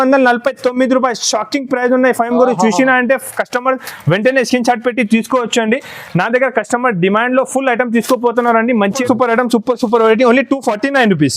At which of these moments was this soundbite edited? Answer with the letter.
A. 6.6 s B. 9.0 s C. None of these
B